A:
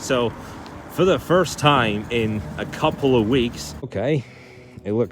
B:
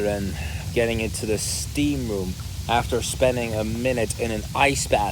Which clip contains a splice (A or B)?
A